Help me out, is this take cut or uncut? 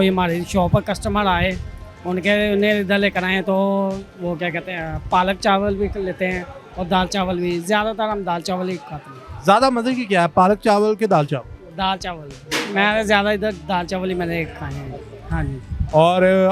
uncut